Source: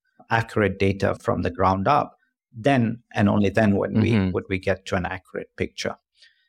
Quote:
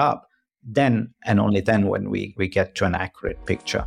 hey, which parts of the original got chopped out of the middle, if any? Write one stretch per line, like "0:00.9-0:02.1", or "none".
0:04.1-0:04.3

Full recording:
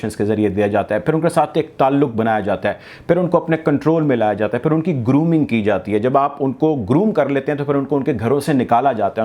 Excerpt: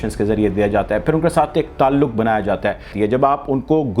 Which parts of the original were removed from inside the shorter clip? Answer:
0:02.9-0:05.8

